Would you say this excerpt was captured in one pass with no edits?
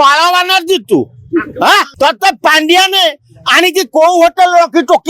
no; 1 cut; at 1.9 s

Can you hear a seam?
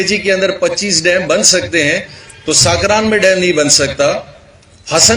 no; 0 cuts

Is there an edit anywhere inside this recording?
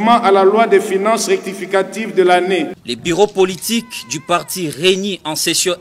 yes; 1 cut; at 2.8 s

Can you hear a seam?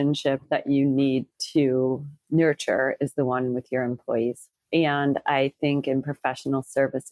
yes; 1 cut; at 2.1 s

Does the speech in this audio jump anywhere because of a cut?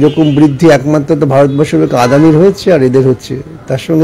no; 0 cuts

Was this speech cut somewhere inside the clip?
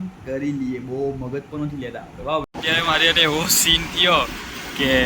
yes; 1 cut; at 2.6 s

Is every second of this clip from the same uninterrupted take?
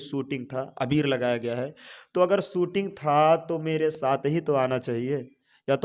yes; 0 cuts

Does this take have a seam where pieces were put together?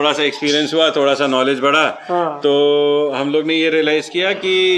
no; 0 cuts

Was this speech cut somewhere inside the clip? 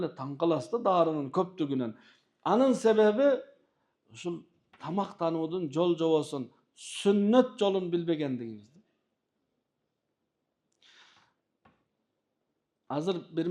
no; 0 cuts

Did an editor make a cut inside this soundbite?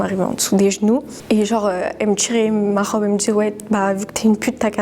no; 0 cuts

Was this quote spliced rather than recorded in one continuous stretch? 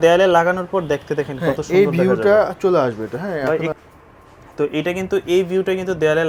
no; 0 cuts

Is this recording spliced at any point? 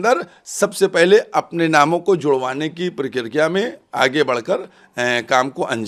no; 0 cuts

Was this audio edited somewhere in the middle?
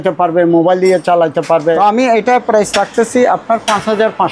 yes; 1 cut; at 1.8 s

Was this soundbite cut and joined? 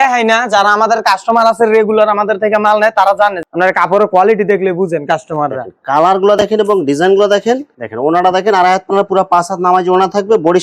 yes; 2 cuts; at 3.4 s, 7.7 s

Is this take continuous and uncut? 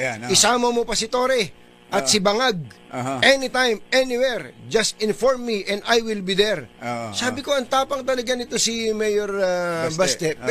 yes; 0 cuts

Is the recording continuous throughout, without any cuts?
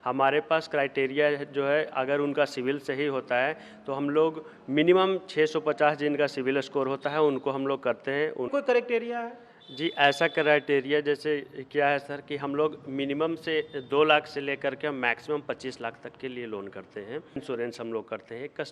no; 2 cuts; at 8.5 s, 17.4 s

